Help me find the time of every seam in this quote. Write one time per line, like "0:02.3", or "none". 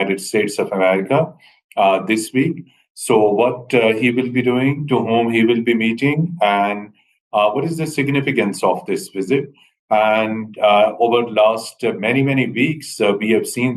none